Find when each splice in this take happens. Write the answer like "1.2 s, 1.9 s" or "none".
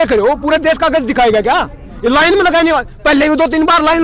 none